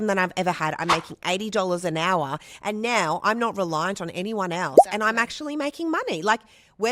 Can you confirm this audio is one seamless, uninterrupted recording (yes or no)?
yes